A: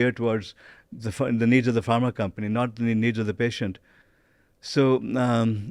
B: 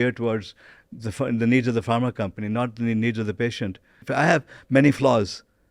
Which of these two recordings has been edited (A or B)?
B